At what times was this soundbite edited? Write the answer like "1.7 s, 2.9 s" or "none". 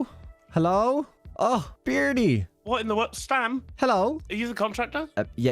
1.2 s, 4.3 s